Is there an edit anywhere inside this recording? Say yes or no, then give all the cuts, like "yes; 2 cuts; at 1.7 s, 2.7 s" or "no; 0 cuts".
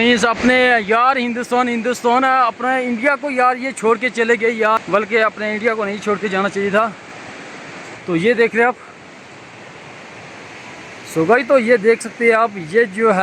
no; 0 cuts